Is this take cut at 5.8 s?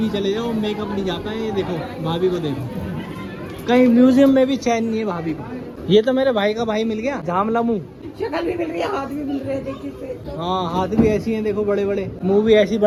no; 0 cuts

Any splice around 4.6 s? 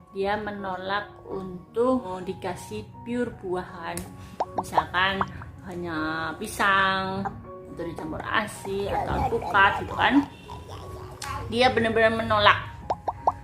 no; 1 cut; at 2.1 s

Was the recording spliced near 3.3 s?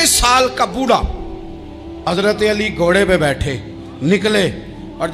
no; 1 cut; at 2.0 s

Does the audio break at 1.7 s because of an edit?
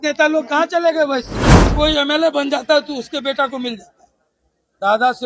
yes; 1 cut; at 1.7 s

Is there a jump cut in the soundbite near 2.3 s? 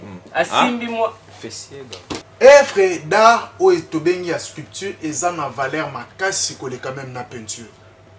yes; 1 cut; at 2.3 s

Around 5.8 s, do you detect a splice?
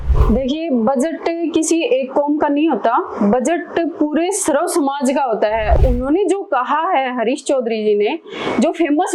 yes; 1 cut; at 5.8 s

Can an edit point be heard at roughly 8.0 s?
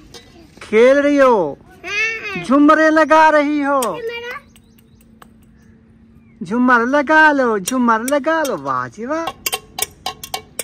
no; 1 cut; at 9.2 s

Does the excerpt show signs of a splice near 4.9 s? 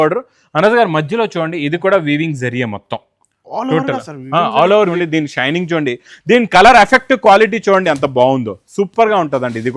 yes; 1 cut; at 4.9 s

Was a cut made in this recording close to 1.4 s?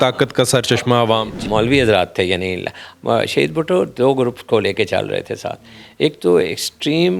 yes; 1 cut; at 1.4 s

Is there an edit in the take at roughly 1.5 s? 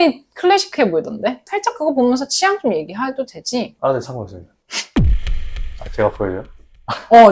yes; 1 cut; at 1.5 s

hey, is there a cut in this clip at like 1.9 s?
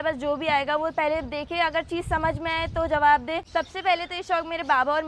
no; 1 cut; at 3.4 s

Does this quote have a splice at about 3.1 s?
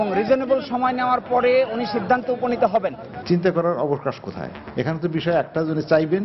yes; 1 cut; at 3.1 s

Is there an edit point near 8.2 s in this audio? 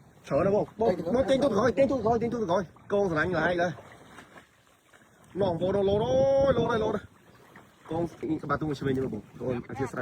yes; 1 cut; at 8.2 s

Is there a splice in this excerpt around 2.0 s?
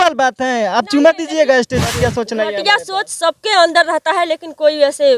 yes; 1 cut; at 2.0 s

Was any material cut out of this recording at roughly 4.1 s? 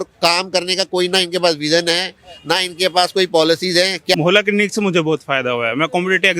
yes; 1 cut; at 4.1 s

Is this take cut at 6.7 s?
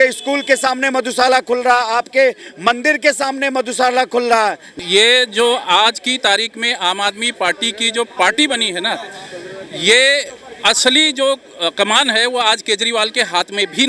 no; 1 cut; at 4.7 s

